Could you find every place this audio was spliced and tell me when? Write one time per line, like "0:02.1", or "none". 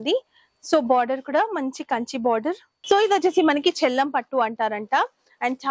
0:02.7

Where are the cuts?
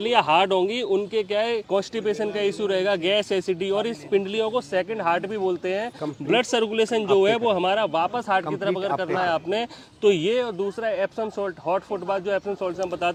none

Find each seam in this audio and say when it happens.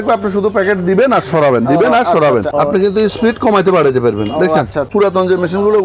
0:02.5
0:04.9

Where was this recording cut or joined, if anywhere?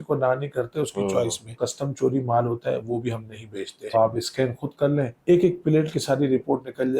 0:01.5
0:03.9
0:05.1

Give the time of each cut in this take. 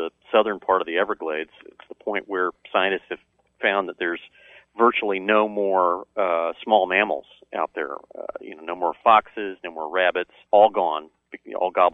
0:10.3

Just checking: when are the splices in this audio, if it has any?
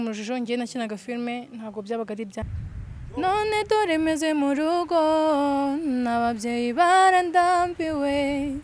0:02.4

